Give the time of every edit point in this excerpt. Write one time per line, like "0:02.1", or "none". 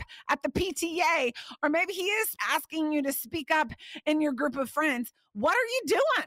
0:02.4